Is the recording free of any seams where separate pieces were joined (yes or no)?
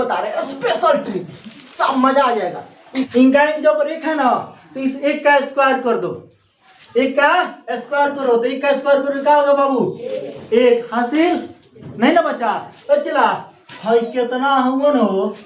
no